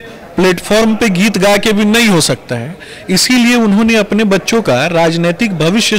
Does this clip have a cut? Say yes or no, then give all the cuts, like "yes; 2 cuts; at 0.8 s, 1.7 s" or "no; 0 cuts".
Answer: no; 0 cuts